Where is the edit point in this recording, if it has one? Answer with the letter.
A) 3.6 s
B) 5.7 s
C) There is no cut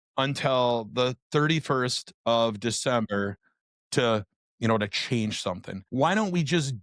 B